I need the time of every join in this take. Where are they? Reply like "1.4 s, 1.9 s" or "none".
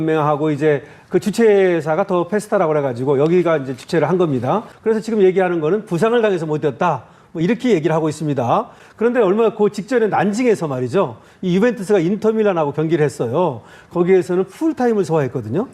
4.7 s